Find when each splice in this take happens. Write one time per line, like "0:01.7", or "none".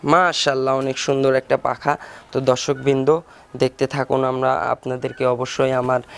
none